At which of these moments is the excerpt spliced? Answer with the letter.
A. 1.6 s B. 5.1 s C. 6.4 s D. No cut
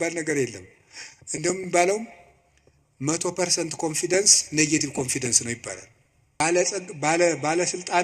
C